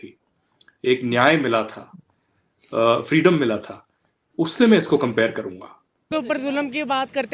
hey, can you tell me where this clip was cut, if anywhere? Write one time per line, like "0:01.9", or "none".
0:06.1